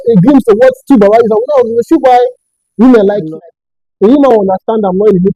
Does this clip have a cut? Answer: yes; 1 cut; at 3.3 s

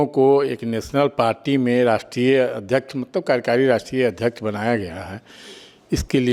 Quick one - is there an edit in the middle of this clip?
no; 0 cuts

